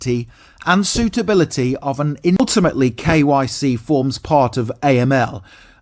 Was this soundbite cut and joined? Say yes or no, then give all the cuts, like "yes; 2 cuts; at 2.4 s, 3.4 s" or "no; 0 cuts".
yes; 1 cut; at 2.4 s